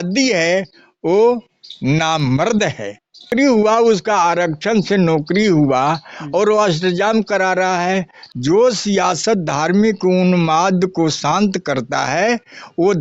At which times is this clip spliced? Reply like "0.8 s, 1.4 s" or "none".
3.3 s, 8.2 s